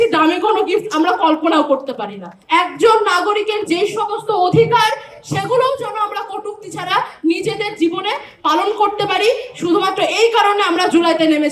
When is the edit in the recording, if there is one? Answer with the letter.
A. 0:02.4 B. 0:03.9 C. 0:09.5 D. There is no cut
A